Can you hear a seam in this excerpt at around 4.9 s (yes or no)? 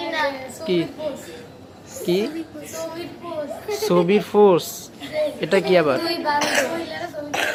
no